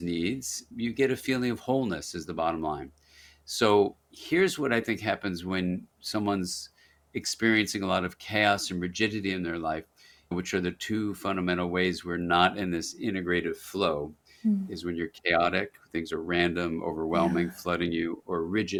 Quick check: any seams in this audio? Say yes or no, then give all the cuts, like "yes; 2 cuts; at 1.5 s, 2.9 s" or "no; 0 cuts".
no; 0 cuts